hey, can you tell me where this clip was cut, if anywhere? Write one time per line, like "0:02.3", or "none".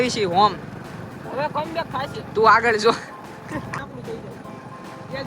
0:03.7